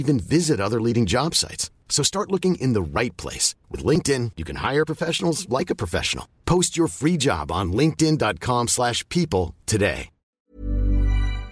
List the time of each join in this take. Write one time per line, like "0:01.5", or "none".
0:10.4